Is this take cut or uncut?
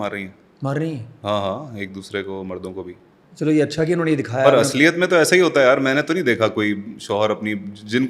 uncut